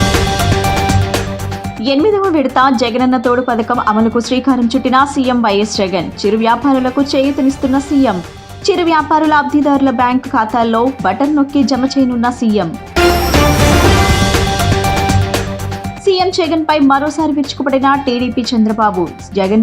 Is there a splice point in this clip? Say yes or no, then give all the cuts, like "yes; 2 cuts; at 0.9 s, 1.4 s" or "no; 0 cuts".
yes; 1 cut; at 1.6 s